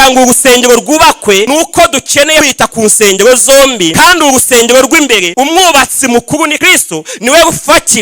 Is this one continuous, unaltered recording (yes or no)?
no